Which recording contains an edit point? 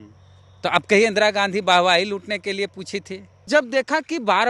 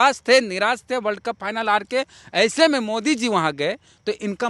first; 1 cut; at 3.4 s

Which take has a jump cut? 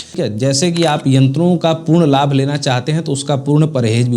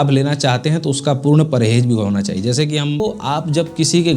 second; 1 cut; at 3.0 s

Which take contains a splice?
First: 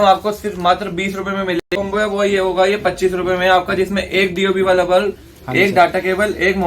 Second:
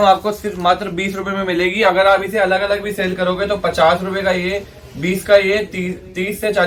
first; 1 cut; at 1.7 s

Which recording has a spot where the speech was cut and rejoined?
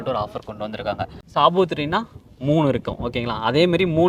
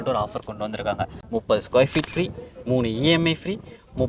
second; 1 cut; at 1.1 s

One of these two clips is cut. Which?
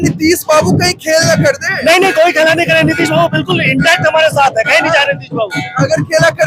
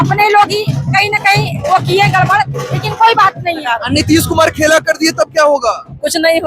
second; 1 cut; at 3.7 s

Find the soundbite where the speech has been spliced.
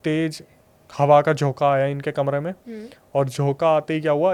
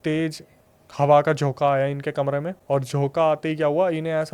second; 1 cut; at 2.5 s

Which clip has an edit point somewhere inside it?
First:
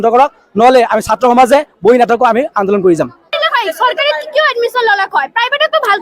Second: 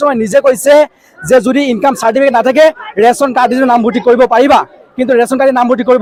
first; 1 cut; at 3.3 s

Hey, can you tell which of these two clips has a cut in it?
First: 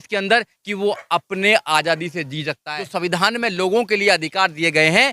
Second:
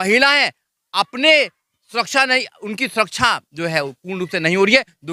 first; 1 cut; at 2.6 s

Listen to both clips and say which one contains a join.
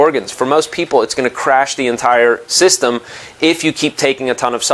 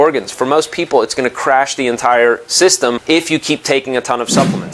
second; 1 cut; at 3.0 s

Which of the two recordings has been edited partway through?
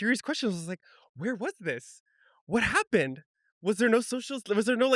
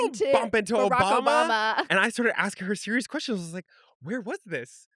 second; 1 cut; at 1.9 s

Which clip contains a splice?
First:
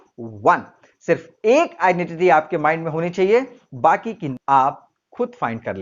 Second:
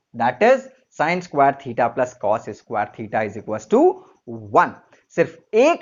first; 1 cut; at 4.2 s

